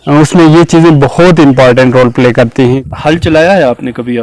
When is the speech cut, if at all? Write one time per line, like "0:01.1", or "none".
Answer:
0:02.8